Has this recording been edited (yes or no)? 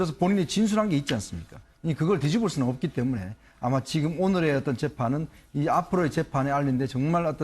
yes